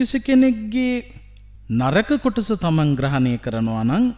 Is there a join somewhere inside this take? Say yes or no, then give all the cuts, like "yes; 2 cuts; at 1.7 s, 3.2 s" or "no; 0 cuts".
no; 0 cuts